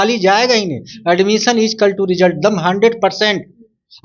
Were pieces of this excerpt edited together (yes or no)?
no